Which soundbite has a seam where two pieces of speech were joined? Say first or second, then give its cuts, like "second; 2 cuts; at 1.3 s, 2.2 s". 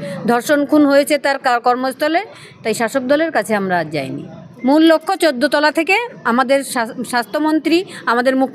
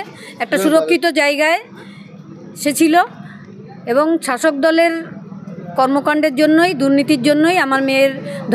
first; 1 cut; at 4.4 s